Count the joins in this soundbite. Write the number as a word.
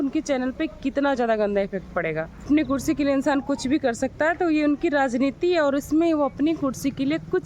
one